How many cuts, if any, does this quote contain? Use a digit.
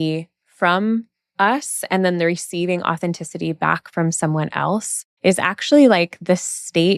1